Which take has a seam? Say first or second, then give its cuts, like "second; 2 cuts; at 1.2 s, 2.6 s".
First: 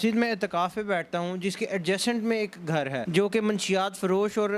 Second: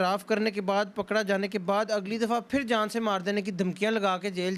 first; 1 cut; at 3.0 s